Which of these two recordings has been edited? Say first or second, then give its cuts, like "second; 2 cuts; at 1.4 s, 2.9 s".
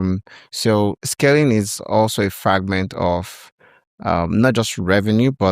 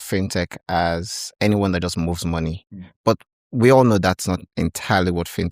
first; 1 cut; at 1.0 s